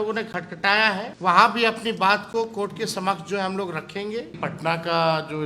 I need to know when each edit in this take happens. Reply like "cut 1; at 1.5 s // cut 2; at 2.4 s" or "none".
cut 1; at 1.1 s // cut 2; at 4.4 s